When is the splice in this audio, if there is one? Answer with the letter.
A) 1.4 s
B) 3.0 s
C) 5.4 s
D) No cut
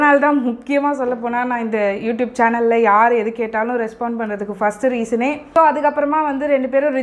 C